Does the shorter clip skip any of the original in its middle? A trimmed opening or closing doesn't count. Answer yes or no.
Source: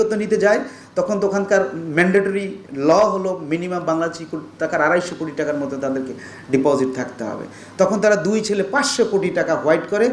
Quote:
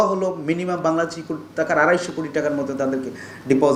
no